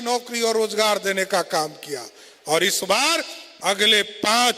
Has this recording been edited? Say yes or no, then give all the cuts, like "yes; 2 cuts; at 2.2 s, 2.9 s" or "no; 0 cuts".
yes; 1 cut; at 3.4 s